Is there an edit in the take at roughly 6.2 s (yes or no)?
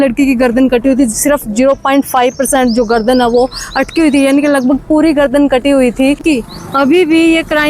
yes